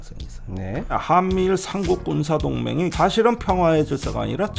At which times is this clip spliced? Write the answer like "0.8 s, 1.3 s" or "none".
1.0 s, 2.9 s